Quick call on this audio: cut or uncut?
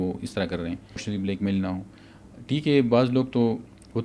cut